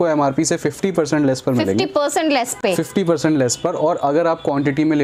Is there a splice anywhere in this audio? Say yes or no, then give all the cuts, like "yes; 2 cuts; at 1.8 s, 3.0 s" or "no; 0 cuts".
no; 0 cuts